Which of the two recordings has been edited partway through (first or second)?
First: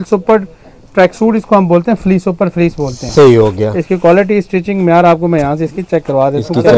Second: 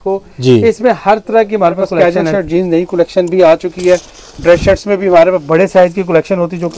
second